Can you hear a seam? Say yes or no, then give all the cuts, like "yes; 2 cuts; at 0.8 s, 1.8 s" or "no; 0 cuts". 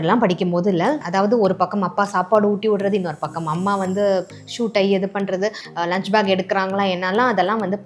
yes; 2 cuts; at 1.0 s, 5.6 s